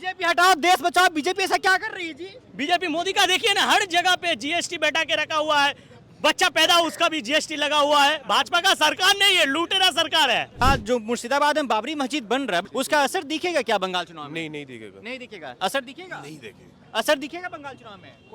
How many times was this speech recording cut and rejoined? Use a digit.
2